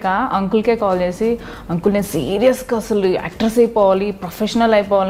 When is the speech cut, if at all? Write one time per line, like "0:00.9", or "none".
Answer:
none